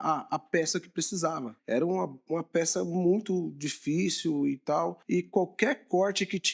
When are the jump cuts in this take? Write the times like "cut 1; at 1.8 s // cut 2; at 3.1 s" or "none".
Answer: cut 1; at 1.5 s // cut 2; at 5.0 s